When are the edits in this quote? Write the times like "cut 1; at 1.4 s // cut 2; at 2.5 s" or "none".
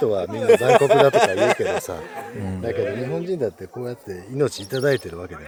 none